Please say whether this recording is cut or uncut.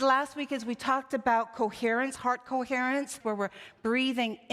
cut